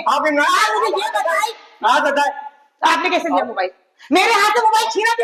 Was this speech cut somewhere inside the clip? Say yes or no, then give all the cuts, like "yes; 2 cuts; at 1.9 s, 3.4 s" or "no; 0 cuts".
no; 0 cuts